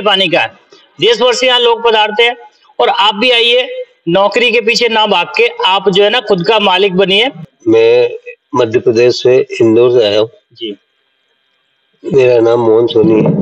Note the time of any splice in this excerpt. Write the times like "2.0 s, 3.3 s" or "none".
7.5 s